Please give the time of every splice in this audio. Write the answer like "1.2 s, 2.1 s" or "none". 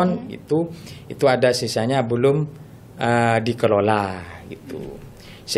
none